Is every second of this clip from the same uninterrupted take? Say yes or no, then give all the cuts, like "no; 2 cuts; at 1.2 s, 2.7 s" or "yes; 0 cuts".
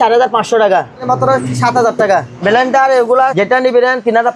no; 3 cuts; at 1.0 s, 2.3 s, 3.3 s